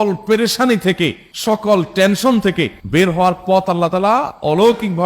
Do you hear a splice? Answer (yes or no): no